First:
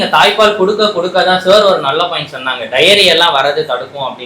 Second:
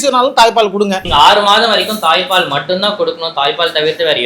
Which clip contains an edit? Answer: second; 1 cut; at 1.0 s

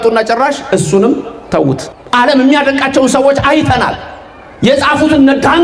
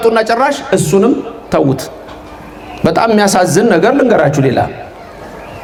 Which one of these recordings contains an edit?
first; 1 cut; at 1.9 s

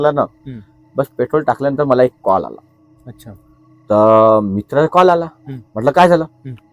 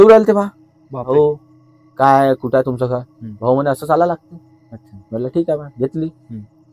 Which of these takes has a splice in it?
second; 1 cut; at 1.0 s

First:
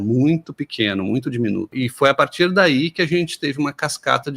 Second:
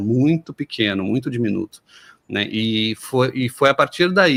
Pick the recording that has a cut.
first; 1 cut; at 1.7 s

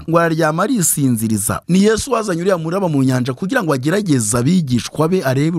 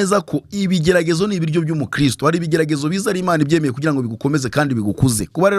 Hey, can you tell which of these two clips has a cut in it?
first; 1 cut; at 1.5 s

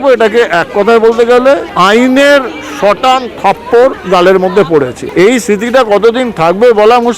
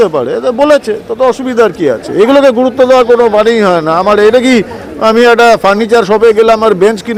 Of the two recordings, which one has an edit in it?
first; 3 cuts; at 1.7 s, 4.0 s, 5.0 s

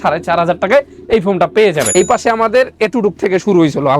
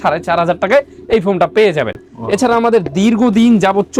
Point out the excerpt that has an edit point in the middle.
first; 1 cut; at 1.9 s

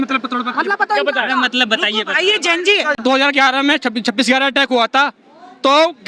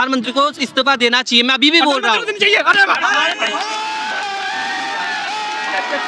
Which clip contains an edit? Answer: first; 1 cut; at 3.0 s

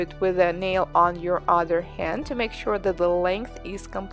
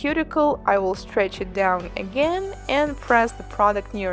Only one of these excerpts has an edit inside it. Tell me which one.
first; 1 cut; at 3.1 s

